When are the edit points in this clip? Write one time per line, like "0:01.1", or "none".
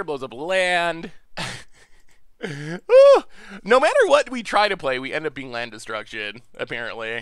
0:01.2